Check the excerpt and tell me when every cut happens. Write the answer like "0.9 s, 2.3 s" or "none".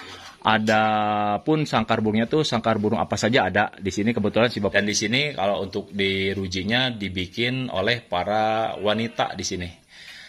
4.7 s